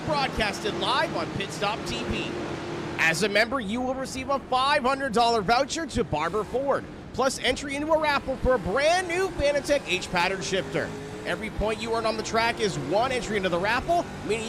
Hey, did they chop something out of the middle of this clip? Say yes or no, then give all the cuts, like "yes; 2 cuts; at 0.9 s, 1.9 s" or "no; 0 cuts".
yes; 1 cut; at 13.1 s